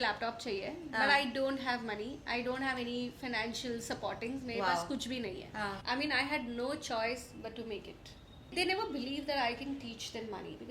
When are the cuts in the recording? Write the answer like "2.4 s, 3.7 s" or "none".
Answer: 5.8 s, 8.5 s